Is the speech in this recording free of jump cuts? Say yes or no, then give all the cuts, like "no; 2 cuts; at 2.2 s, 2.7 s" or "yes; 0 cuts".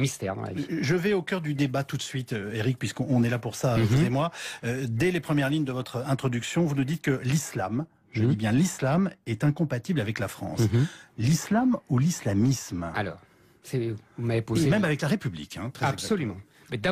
no; 1 cut; at 6.5 s